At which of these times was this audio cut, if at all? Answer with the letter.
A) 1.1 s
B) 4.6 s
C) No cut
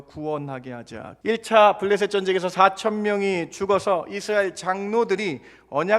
A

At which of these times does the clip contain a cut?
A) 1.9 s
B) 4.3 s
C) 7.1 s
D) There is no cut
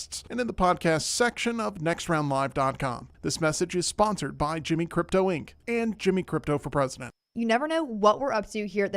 C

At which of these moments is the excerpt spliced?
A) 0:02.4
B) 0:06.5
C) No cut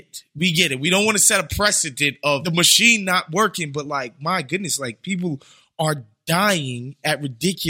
A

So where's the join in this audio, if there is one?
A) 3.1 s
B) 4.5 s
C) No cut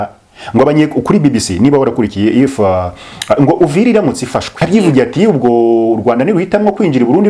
B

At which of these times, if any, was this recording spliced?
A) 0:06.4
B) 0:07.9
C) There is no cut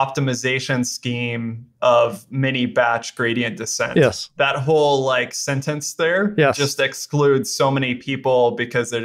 A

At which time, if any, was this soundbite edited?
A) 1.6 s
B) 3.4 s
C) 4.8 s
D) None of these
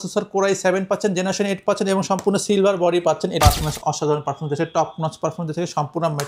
B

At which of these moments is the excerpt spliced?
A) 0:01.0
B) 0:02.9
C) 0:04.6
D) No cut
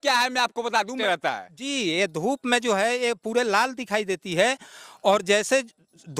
A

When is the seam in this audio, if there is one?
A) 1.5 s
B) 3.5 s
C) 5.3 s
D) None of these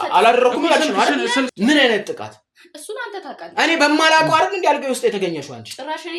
A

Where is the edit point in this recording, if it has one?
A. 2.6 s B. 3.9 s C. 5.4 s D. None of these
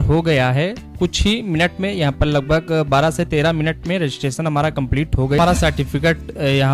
C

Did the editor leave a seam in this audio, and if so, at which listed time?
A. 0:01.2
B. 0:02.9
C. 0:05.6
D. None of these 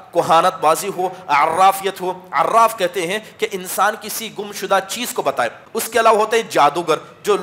C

